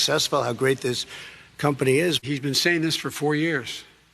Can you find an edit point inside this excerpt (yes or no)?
yes